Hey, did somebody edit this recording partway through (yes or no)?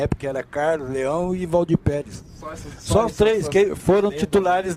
no